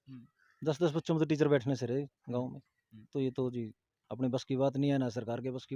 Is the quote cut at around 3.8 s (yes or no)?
no